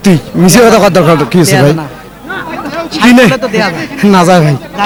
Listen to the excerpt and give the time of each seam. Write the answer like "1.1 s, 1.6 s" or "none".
none